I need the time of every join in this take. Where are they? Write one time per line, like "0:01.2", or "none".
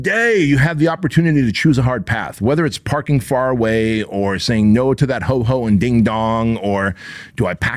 none